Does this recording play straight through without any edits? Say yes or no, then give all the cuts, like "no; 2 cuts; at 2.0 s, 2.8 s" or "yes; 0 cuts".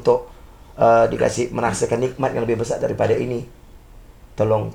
yes; 0 cuts